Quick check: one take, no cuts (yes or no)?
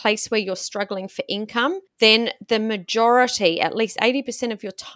no